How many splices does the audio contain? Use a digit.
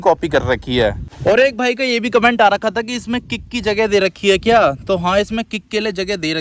1